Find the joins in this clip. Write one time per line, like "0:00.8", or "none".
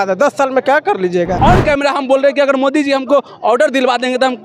0:01.3